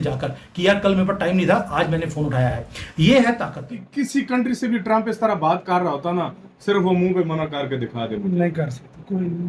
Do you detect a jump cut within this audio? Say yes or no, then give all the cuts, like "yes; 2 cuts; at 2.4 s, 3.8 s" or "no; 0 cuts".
yes; 1 cut; at 3.8 s